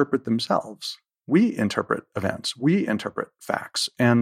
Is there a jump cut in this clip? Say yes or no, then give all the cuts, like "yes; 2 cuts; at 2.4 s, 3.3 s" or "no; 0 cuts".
no; 0 cuts